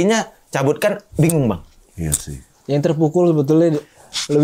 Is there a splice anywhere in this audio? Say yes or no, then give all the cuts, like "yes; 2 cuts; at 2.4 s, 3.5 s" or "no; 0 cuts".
no; 0 cuts